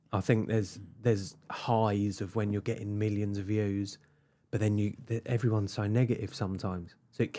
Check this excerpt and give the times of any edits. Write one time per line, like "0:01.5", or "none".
none